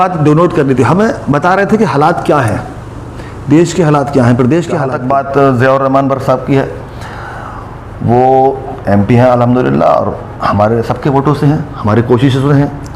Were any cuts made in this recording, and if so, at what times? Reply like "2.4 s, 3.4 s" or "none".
4.9 s

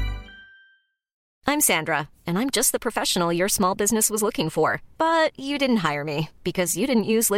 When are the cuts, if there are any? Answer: 1.2 s

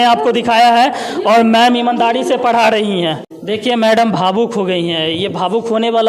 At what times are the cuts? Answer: 3.3 s

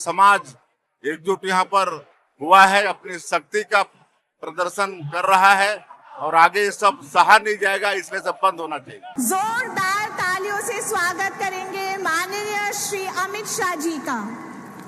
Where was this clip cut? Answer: 9.0 s

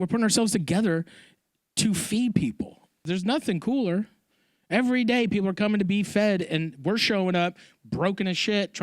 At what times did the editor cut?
3.0 s

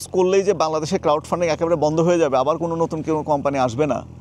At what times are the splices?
none

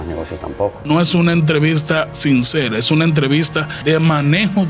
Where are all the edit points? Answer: 0.8 s, 3.7 s

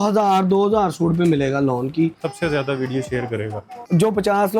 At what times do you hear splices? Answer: 2.2 s, 3.8 s

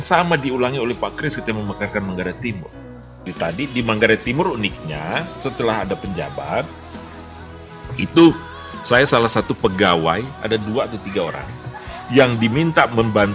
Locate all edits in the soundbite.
3.2 s

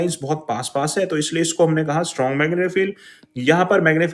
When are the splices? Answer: none

